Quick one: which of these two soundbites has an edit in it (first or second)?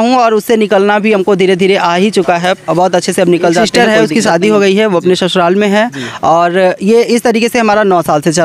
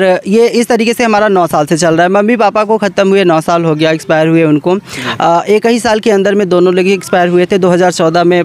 first